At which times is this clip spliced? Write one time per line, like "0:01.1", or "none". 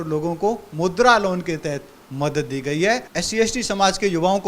0:03.1